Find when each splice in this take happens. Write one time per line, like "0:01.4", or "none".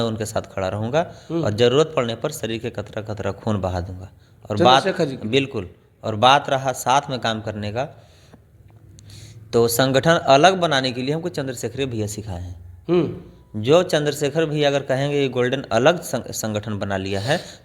none